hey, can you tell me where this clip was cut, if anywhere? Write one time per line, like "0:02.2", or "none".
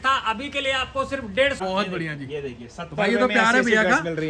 0:01.6